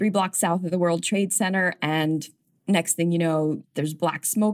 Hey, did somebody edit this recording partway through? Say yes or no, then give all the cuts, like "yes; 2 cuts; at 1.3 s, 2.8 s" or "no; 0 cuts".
yes; 2 cuts; at 2.5 s, 3.6 s